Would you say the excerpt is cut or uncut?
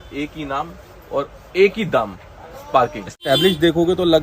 cut